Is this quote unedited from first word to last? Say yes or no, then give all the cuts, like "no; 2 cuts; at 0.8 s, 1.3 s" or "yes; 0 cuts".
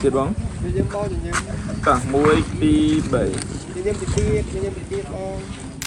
yes; 0 cuts